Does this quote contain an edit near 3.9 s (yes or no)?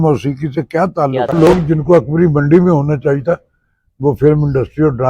no